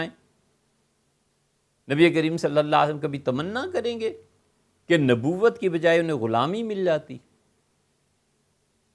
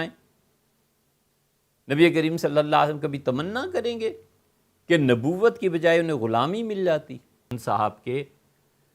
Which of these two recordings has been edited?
second; 1 cut; at 7.5 s

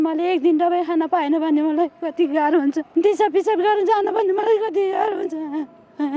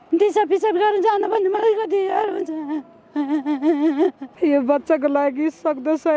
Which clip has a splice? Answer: second; 1 cut; at 4.2 s

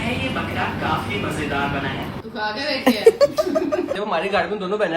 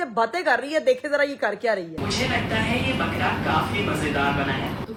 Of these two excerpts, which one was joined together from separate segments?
first; 1 cut; at 3.9 s

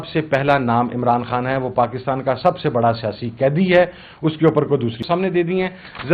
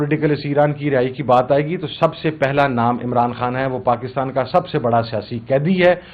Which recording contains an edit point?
first; 1 cut; at 5.0 s

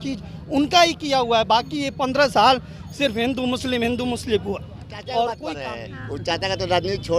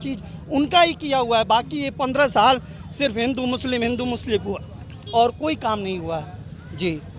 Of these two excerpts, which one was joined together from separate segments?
first; 1 cut; at 5.7 s

